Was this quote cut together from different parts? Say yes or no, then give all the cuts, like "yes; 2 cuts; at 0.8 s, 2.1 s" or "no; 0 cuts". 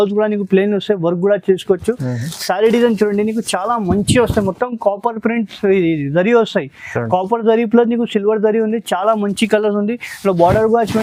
no; 0 cuts